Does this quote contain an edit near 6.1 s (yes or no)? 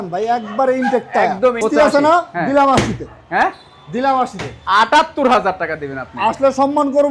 no